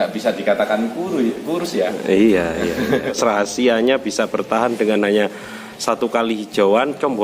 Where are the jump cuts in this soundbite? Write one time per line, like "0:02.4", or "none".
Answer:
0:03.2

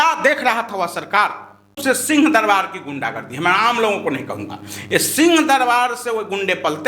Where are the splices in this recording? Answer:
0:01.8

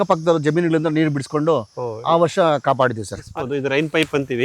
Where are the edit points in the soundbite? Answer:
0:03.2

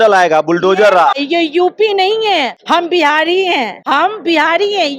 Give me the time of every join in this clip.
0:01.2
0:02.6
0:03.8

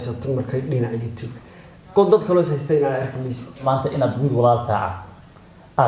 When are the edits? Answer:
0:03.6

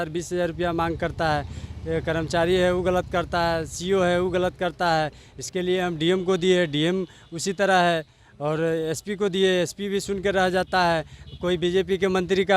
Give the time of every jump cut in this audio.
none

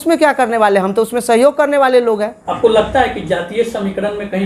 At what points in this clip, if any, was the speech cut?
none

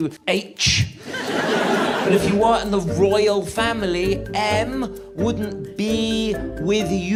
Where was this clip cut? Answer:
none

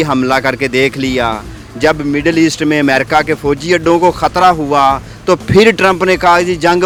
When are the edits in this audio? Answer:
none

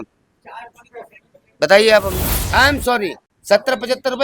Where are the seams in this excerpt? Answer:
0:02.3
0:03.3

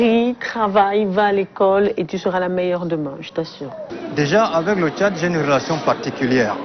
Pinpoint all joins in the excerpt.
0:03.8

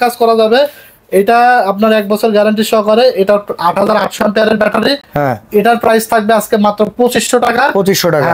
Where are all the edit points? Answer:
none

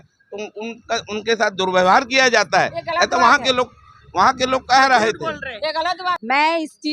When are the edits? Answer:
0:05.9

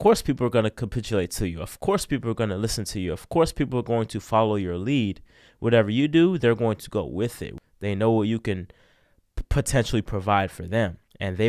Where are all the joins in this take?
0:07.5

